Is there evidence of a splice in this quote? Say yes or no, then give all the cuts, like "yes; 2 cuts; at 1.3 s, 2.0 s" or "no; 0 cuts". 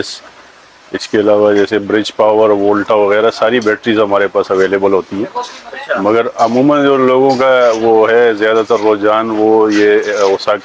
no; 0 cuts